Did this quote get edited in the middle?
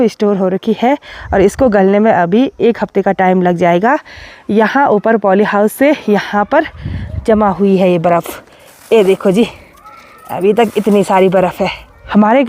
no; 0 cuts

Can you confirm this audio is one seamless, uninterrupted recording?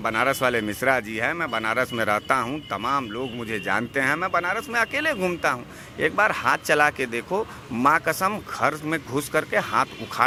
yes; 0 cuts

